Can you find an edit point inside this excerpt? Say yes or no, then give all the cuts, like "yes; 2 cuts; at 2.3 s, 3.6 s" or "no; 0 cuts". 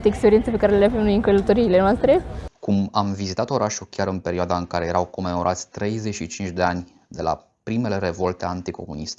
yes; 1 cut; at 2.3 s